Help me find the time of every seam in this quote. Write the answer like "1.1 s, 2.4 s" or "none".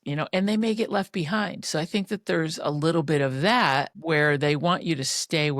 3.9 s